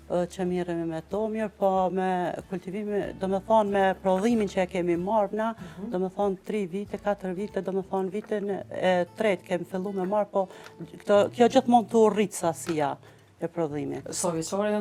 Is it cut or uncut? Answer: uncut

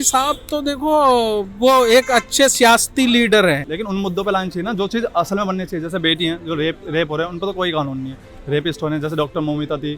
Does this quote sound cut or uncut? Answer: cut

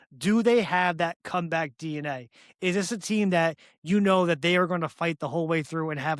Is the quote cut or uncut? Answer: uncut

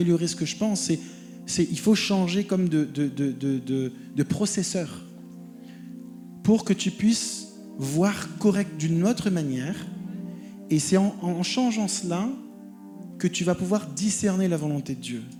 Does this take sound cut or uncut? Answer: uncut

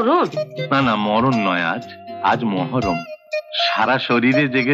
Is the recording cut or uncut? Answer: uncut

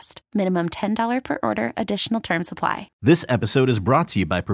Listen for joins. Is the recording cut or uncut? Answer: uncut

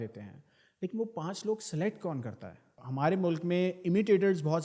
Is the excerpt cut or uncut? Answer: cut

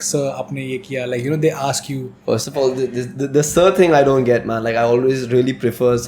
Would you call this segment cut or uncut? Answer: uncut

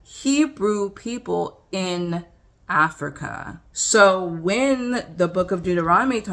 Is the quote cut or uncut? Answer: uncut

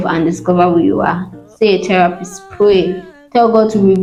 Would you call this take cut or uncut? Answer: uncut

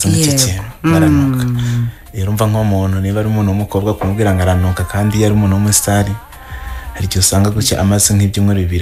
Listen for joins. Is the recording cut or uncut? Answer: uncut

